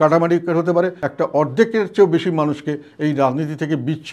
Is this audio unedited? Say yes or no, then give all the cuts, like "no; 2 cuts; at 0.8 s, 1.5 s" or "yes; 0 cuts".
no; 1 cut; at 1.0 s